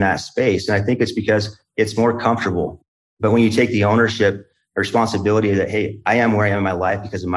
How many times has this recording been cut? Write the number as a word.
one